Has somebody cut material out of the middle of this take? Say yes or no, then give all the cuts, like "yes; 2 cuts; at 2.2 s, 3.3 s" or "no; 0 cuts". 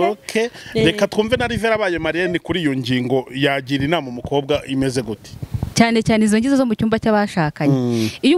yes; 1 cut; at 5.7 s